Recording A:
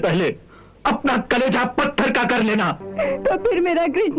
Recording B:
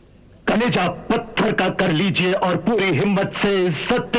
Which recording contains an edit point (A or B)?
A